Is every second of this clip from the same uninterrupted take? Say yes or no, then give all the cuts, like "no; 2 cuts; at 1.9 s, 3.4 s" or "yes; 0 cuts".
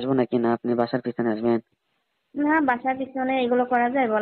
yes; 0 cuts